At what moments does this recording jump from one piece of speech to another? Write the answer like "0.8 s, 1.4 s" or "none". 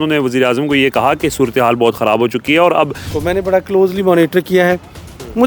3.1 s